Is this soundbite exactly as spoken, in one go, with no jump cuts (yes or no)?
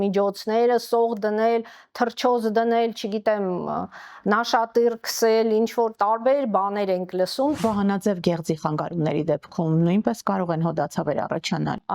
no